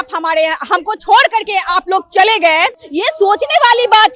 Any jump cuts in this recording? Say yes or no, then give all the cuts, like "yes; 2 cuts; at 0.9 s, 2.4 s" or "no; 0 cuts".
yes; 1 cut; at 2.8 s